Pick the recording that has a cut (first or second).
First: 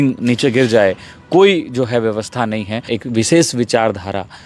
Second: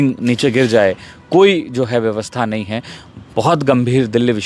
first